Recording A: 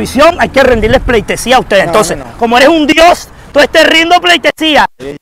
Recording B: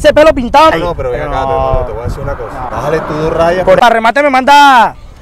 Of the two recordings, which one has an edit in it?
B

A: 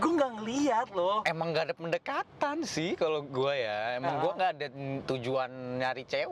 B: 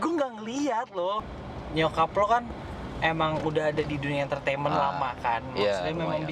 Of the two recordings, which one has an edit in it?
B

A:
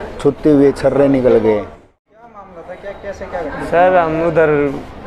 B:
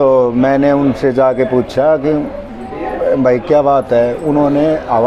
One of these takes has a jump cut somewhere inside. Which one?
A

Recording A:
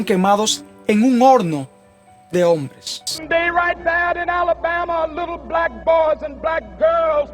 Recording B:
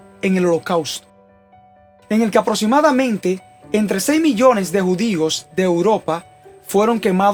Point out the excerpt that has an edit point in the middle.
A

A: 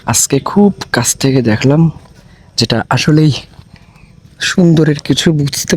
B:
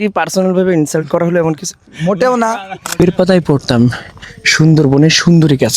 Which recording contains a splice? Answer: B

